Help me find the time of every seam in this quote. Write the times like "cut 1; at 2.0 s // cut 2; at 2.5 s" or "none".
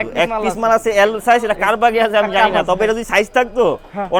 none

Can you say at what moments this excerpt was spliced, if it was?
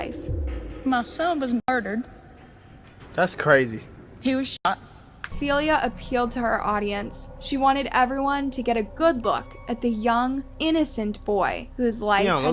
cut 1; at 5.3 s

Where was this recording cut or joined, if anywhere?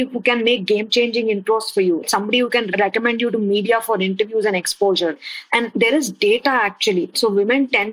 cut 1; at 2.0 s // cut 2; at 5.1 s // cut 3; at 7.1 s

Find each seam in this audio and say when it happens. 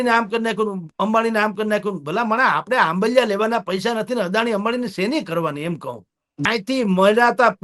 cut 1; at 6.2 s

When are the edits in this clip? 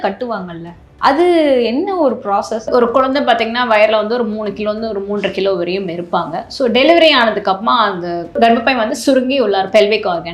cut 1; at 2.7 s // cut 2; at 8.4 s

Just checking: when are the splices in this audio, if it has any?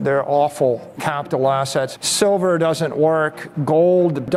none

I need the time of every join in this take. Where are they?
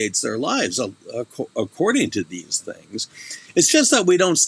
none

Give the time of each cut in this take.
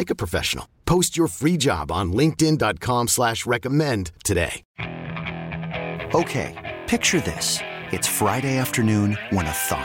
cut 1; at 4.6 s

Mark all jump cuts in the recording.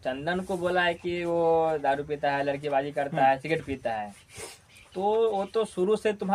none

